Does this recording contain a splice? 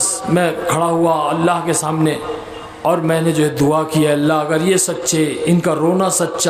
no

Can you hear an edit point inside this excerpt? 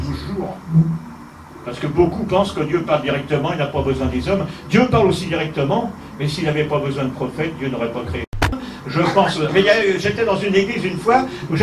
yes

